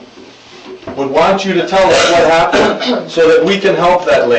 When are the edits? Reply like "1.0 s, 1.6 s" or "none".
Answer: none